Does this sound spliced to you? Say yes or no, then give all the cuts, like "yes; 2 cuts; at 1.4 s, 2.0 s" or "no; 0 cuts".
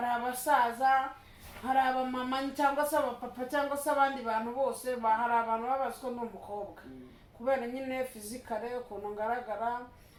no; 0 cuts